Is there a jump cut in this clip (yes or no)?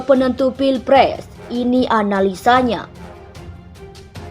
yes